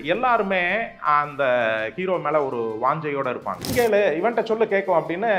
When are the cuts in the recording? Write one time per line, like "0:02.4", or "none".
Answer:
0:03.7